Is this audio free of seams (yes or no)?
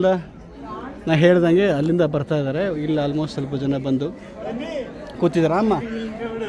yes